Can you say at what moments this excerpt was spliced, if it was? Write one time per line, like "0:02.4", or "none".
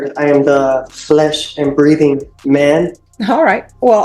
0:03.1